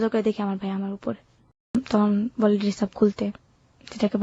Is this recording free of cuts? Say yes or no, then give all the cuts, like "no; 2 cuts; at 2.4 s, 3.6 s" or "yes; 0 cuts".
no; 1 cut; at 1.7 s